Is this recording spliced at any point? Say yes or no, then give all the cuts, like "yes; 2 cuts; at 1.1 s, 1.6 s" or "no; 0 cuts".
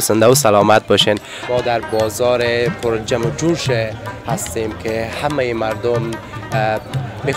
yes; 1 cut; at 1.4 s